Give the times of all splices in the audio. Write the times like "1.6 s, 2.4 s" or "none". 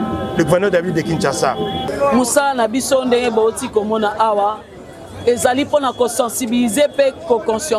1.9 s